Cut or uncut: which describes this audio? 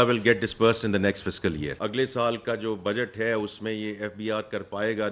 cut